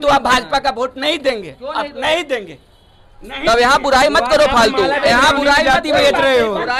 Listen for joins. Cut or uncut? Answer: uncut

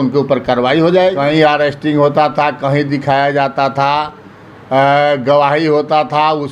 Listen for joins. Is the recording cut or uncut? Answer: cut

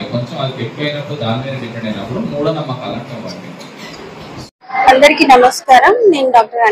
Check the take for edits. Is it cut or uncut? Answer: cut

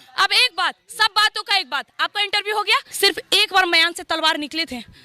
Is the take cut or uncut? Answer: cut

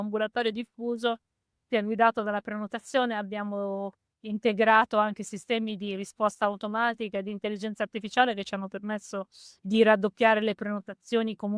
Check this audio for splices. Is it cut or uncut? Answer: uncut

